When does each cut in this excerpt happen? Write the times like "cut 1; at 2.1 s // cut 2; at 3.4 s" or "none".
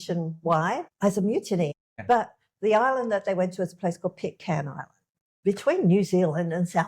cut 1; at 0.9 s // cut 2; at 1.7 s // cut 3; at 5.3 s